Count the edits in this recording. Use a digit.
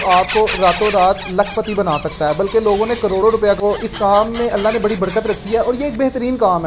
1